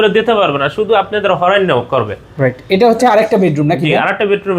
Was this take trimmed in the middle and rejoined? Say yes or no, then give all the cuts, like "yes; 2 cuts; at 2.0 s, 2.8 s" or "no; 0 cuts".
no; 0 cuts